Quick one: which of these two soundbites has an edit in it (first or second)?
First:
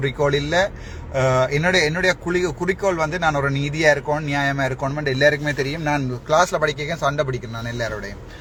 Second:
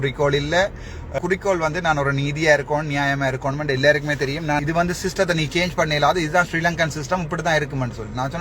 second